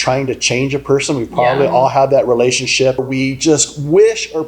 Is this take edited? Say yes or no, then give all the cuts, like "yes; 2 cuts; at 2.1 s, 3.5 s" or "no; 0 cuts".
yes; 1 cut; at 3.0 s